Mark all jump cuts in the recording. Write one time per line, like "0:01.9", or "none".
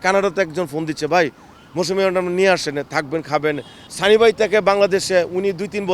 0:03.8